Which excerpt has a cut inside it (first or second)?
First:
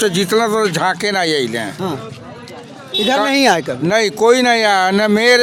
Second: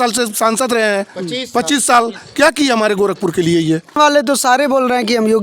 second